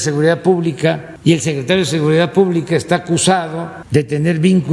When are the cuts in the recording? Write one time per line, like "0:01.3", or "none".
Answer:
0:01.1
0:03.7

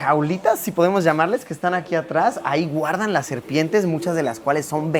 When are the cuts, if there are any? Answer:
none

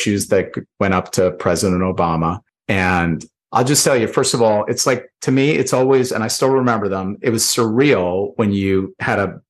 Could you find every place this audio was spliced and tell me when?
0:02.5
0:03.3

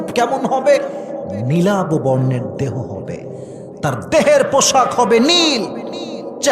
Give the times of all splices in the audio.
none

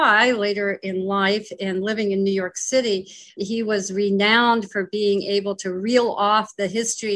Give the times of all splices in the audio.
none

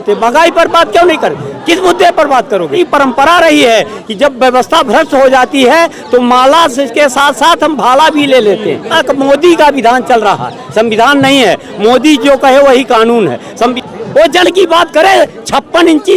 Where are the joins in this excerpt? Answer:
0:02.8
0:08.9
0:13.7

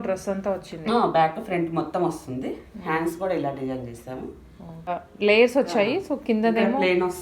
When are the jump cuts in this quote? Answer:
0:04.9

